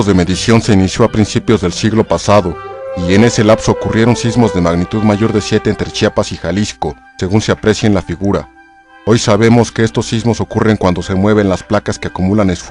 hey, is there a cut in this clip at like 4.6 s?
yes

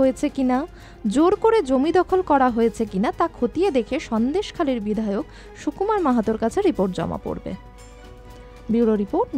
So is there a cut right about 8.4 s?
yes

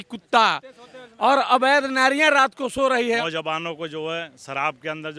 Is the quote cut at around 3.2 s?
yes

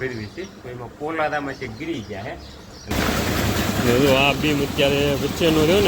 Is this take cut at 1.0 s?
no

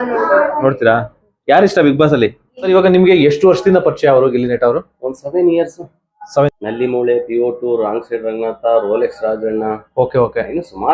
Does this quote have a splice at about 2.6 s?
yes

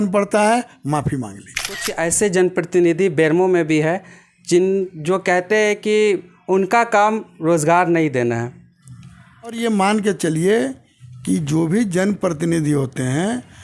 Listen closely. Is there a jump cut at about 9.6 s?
yes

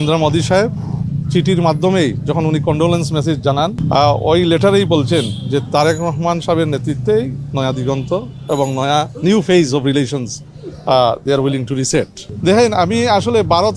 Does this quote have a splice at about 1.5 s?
no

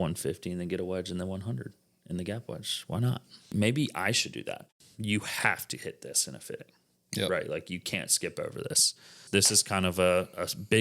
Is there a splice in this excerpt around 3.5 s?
yes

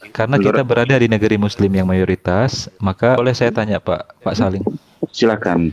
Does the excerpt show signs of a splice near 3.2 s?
yes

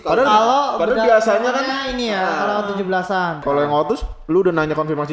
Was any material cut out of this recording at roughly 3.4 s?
yes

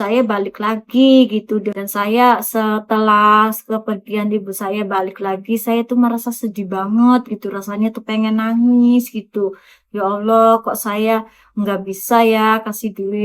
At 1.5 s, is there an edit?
yes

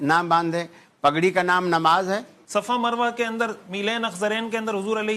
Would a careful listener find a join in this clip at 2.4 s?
yes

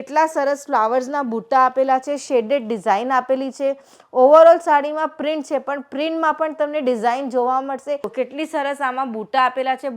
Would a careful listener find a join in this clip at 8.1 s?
yes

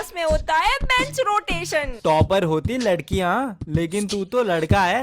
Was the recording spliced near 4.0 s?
no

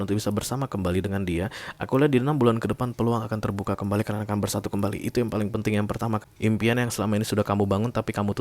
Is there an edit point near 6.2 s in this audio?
yes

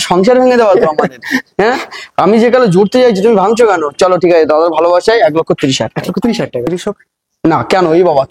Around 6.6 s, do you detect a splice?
yes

